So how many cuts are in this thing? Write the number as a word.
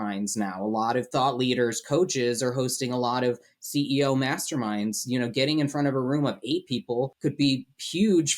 two